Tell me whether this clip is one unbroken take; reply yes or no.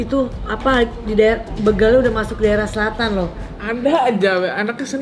no